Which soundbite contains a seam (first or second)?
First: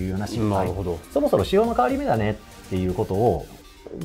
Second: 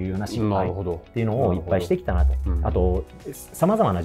first